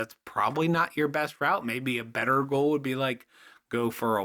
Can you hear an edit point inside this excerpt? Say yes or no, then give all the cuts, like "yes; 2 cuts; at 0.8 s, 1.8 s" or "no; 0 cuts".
no; 0 cuts